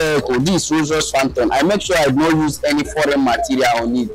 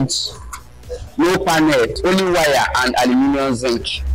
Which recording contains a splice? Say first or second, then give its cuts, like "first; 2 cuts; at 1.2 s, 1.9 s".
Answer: second; 1 cut; at 2.0 s